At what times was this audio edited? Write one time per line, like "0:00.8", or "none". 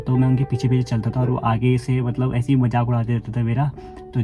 none